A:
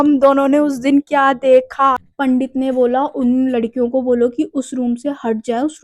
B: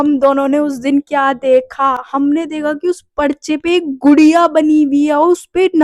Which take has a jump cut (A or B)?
A